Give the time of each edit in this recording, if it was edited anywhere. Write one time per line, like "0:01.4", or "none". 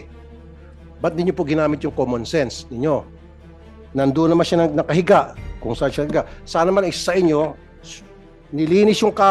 none